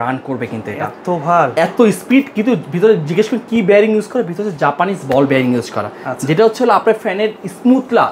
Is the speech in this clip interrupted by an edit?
no; 0 cuts

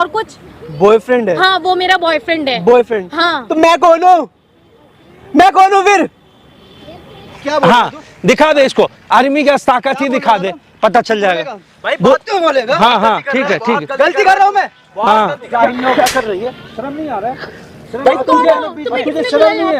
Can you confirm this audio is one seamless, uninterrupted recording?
no; 2 cuts; at 7.3 s, 15.5 s

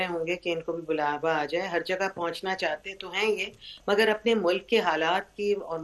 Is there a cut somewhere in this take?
no; 0 cuts

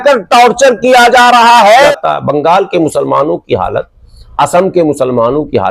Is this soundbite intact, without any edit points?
no; 1 cut; at 1.9 s

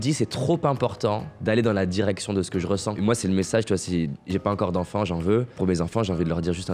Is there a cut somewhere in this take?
yes; 2 cuts; at 3.0 s, 5.5 s

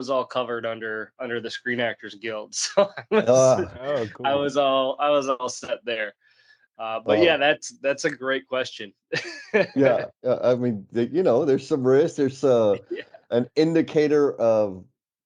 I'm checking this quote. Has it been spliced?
no; 0 cuts

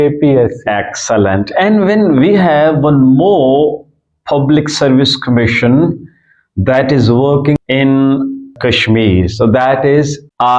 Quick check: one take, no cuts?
yes; 0 cuts

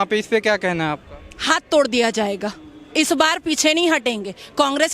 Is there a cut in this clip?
no; 0 cuts

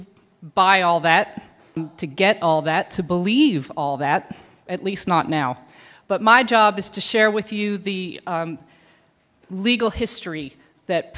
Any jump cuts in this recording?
no; 0 cuts

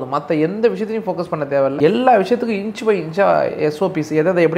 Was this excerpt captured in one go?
yes; 0 cuts

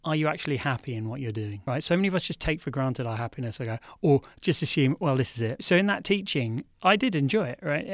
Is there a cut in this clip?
yes; 2 cuts; at 1.5 s, 5.6 s

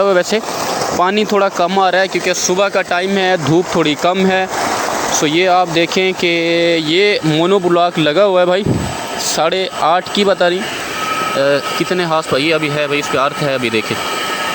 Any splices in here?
no; 0 cuts

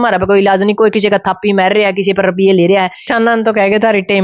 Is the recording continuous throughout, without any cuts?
no; 1 cut; at 3.0 s

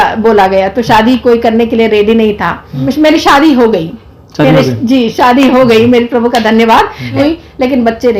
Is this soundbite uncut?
no; 2 cuts; at 2.8 s, 7.2 s

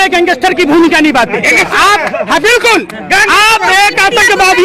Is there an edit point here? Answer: no; 0 cuts

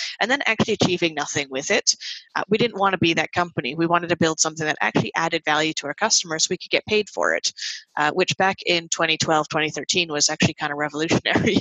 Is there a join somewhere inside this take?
no; 0 cuts

